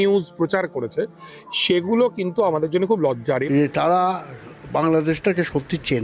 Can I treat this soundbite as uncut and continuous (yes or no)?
no